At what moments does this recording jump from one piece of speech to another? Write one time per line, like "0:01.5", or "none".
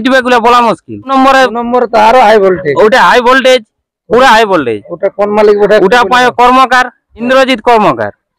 0:01.1
0:07.3